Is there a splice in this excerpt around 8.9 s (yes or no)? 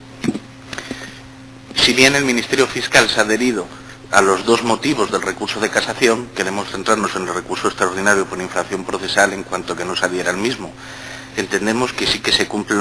yes